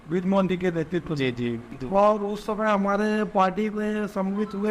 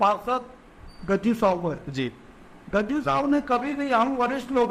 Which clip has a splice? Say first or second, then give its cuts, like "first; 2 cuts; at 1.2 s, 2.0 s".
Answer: first; 1 cut; at 1.7 s